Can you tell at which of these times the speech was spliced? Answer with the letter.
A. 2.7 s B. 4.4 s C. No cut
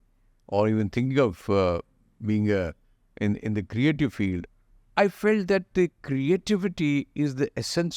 B